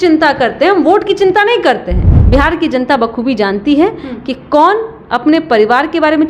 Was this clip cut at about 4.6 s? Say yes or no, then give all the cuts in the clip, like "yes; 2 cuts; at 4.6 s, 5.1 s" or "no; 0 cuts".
no; 1 cut; at 2.1 s